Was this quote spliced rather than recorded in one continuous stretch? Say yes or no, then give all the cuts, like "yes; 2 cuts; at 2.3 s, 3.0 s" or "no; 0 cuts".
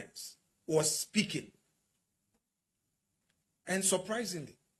no; 0 cuts